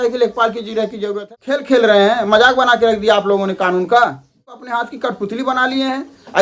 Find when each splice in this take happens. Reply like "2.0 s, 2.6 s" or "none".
1.1 s, 4.7 s